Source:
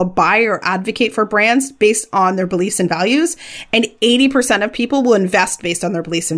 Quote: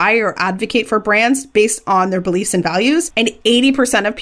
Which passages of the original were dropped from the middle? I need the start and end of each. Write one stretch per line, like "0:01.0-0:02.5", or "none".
0:03.4-0:03.7